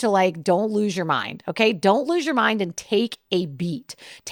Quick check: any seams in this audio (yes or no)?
no